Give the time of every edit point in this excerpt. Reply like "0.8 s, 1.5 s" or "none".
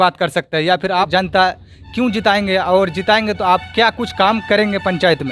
1.1 s